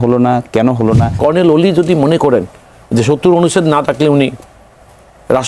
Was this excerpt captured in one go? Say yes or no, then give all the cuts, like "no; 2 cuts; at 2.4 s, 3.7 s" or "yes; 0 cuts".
no; 1 cut; at 1.2 s